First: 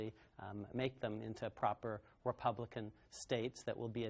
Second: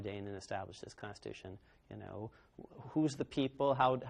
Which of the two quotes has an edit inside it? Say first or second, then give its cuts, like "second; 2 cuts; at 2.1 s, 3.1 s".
first; 1 cut; at 1.0 s